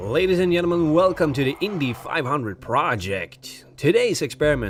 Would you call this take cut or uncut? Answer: uncut